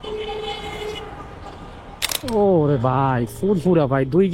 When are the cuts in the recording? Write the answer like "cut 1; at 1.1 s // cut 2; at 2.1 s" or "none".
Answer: cut 1; at 2.2 s